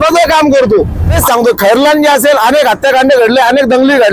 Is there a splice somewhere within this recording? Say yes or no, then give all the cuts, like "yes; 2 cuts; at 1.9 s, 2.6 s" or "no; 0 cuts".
yes; 1 cut; at 1.2 s